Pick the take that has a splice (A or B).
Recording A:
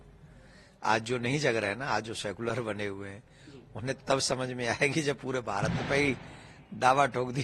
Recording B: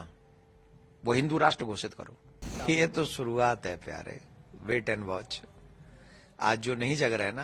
B